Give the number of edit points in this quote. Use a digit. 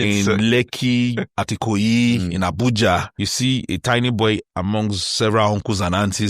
2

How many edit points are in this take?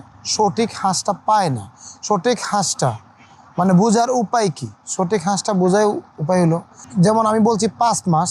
1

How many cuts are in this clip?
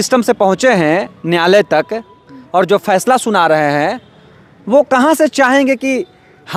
0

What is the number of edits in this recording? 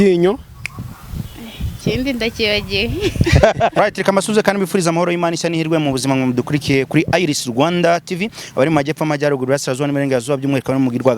1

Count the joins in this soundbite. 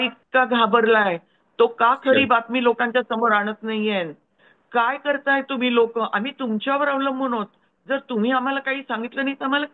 0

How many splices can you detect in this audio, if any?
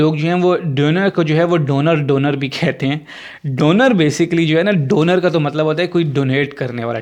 0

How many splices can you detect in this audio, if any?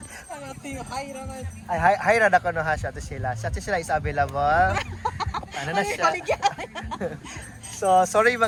0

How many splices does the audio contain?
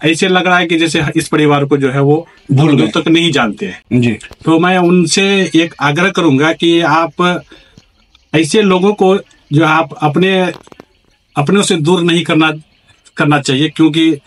0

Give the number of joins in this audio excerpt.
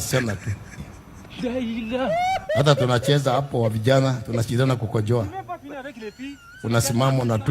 2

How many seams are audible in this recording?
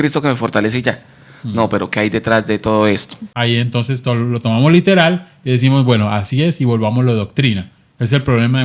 1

